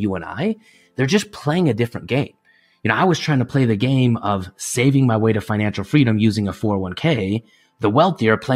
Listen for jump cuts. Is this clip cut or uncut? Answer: uncut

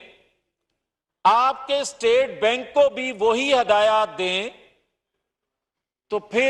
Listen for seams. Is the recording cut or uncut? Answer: uncut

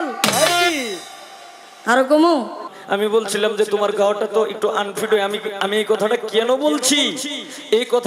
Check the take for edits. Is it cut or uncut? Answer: cut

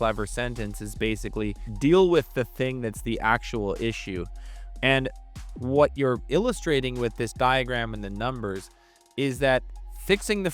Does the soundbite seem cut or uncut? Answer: uncut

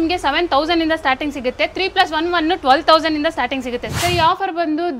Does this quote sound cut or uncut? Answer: cut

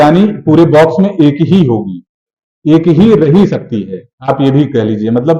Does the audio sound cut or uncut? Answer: uncut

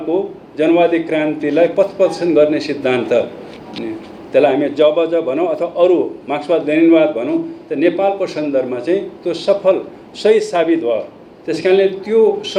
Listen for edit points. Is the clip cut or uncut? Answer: uncut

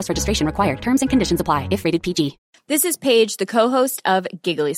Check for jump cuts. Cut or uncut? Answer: cut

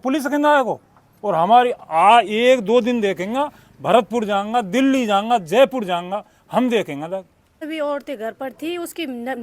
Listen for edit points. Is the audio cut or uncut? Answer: cut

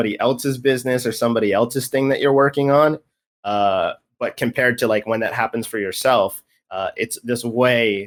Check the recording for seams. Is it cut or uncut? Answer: uncut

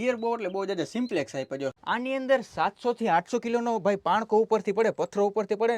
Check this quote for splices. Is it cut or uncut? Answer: cut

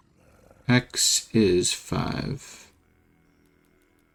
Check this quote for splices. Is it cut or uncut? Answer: uncut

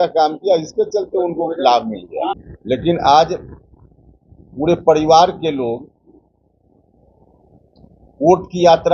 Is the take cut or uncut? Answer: cut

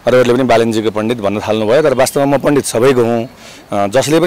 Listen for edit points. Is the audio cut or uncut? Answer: uncut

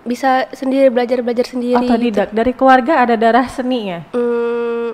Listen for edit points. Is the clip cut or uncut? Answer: uncut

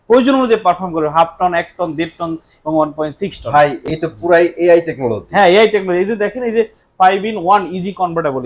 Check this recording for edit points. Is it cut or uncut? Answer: uncut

